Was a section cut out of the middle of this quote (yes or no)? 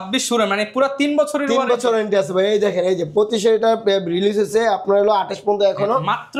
no